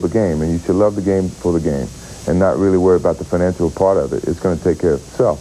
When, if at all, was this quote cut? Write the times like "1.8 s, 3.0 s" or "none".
none